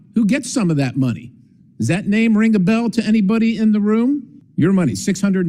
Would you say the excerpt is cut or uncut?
cut